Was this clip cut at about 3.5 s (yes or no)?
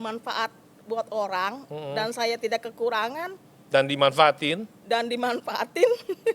no